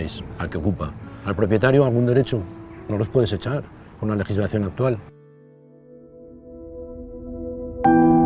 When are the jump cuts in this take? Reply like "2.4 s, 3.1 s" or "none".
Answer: none